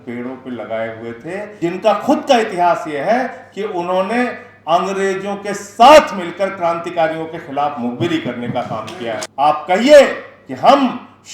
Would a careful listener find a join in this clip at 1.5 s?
yes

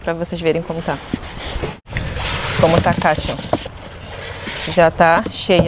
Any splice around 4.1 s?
no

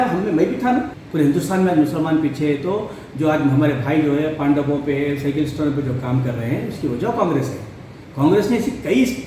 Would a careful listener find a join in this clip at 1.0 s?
yes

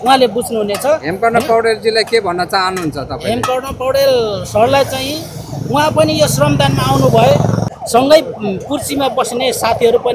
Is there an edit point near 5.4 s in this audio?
no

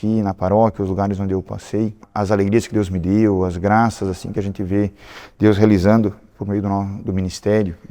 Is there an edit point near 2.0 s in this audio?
yes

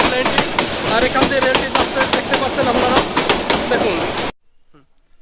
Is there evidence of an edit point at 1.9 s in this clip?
no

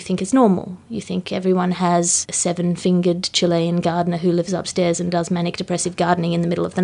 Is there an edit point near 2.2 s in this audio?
yes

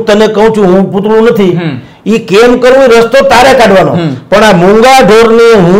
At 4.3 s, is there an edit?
no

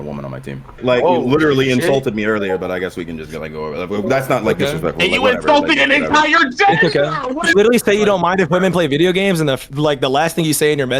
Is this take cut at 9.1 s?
no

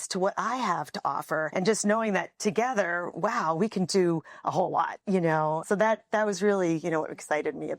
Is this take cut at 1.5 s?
yes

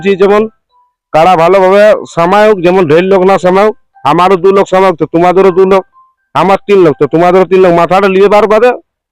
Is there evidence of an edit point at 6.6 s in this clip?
no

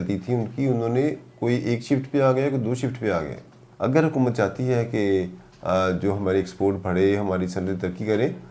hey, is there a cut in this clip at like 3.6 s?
yes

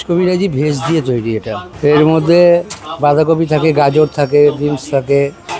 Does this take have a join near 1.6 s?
yes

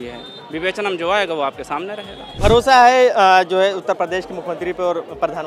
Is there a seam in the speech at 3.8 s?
no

